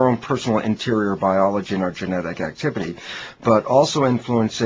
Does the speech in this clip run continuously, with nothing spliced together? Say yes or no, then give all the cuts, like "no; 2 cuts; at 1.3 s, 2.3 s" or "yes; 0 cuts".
no; 1 cut; at 1.3 s